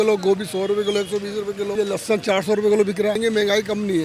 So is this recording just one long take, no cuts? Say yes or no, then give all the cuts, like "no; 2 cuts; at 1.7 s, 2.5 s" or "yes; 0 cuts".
no; 2 cuts; at 1.7 s, 3.2 s